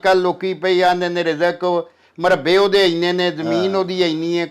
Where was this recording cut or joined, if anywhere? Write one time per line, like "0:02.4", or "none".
none